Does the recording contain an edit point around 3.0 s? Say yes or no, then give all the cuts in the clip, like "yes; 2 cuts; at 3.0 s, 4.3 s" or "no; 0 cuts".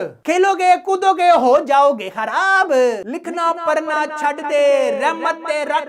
yes; 1 cut; at 3.0 s